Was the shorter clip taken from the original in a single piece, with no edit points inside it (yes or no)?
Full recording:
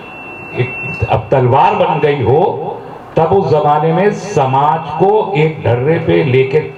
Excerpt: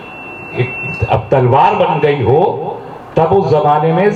yes